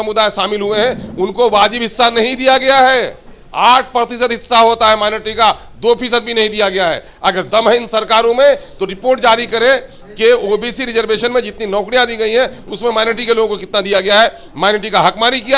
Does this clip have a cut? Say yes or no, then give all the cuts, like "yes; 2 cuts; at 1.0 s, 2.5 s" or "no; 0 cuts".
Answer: no; 0 cuts